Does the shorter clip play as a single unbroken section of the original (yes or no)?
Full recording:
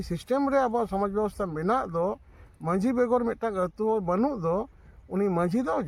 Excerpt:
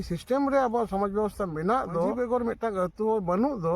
no